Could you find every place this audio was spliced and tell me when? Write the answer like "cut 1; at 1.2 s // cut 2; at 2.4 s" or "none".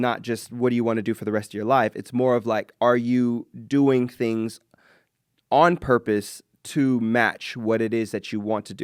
none